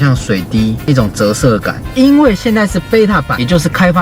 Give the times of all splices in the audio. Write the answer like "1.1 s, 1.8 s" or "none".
1.9 s